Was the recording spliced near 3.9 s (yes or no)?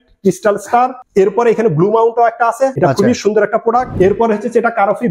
yes